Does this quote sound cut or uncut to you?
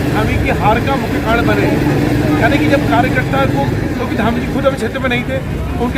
uncut